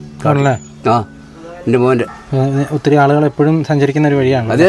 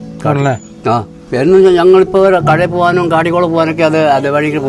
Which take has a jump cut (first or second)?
second